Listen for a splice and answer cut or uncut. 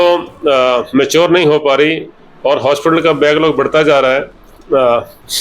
cut